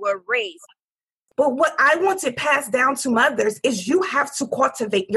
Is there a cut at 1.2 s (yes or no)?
yes